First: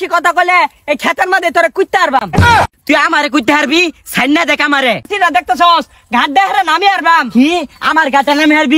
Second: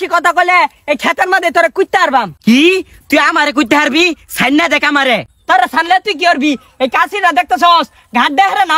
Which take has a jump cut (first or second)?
first